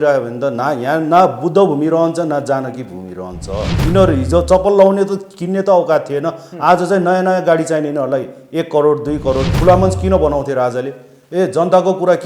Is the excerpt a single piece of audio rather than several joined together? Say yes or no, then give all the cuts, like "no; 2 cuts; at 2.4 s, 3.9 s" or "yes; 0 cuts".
no; 2 cuts; at 3.8 s, 9.5 s